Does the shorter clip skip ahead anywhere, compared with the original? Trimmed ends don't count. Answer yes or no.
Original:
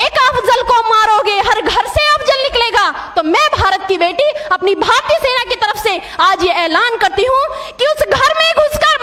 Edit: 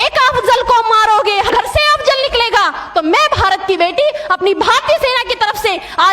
yes